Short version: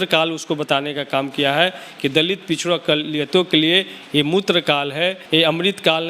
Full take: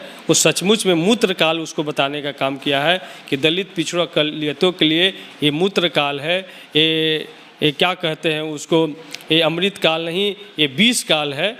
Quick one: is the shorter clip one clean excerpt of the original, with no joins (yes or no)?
no